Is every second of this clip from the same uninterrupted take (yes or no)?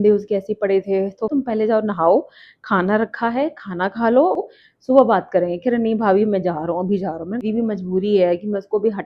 no